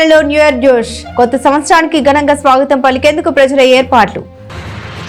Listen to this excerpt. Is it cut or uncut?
uncut